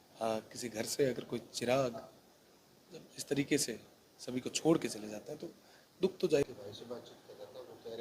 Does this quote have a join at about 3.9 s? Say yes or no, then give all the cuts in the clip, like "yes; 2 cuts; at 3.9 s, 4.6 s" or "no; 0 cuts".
no; 1 cut; at 6.5 s